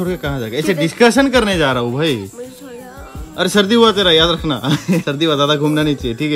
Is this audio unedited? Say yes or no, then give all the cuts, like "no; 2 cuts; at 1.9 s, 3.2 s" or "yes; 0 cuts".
yes; 0 cuts